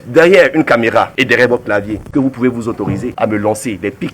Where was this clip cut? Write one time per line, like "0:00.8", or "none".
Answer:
0:01.1
0:02.0
0:03.1